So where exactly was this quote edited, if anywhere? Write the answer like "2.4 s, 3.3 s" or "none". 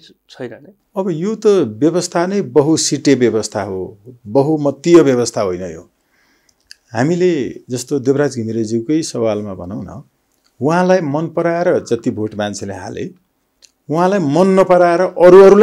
none